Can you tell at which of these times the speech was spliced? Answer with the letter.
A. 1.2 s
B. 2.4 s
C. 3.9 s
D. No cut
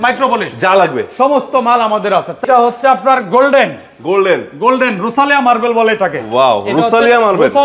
B